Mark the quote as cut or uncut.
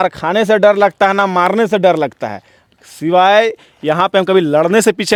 uncut